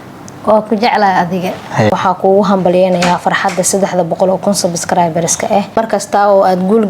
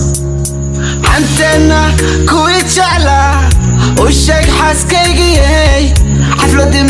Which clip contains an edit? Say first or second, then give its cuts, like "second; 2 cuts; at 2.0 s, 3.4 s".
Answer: first; 2 cuts; at 1.9 s, 5.7 s